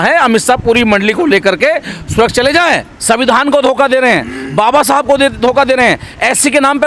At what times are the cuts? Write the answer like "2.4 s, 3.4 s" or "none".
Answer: 2.9 s